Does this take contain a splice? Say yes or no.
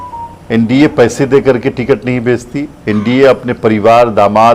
no